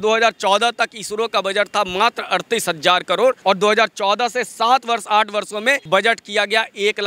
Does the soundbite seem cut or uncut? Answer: cut